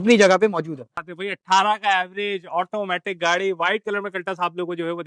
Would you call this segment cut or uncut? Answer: cut